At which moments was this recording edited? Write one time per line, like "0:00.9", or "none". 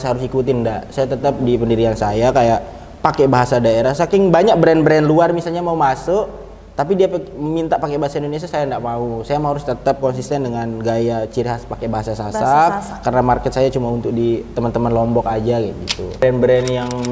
0:16.2